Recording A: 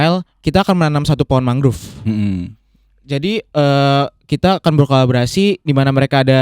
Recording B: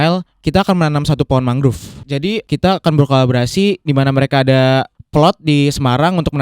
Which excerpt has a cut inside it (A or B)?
B